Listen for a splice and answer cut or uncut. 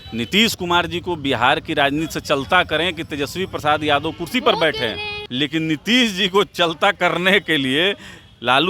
cut